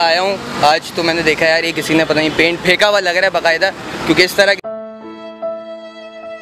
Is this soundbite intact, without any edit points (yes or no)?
yes